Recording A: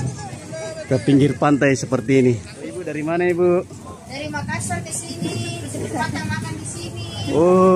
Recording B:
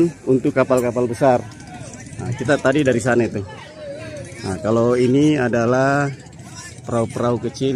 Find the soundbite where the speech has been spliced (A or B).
A